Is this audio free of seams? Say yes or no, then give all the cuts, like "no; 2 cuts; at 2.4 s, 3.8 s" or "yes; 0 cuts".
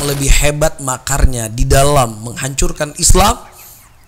yes; 0 cuts